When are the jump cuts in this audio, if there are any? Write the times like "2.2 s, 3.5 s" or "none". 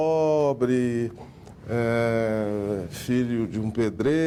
none